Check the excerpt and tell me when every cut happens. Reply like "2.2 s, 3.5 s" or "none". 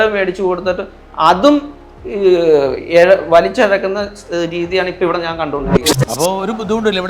5.8 s